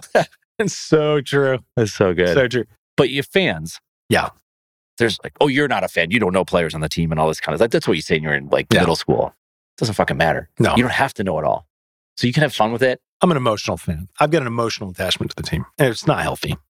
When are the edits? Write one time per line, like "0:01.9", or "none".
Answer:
0:02.8